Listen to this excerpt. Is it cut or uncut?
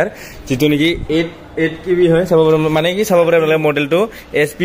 uncut